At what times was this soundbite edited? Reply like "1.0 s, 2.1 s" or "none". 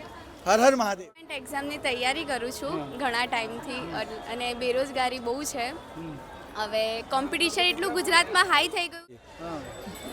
1.3 s, 9.2 s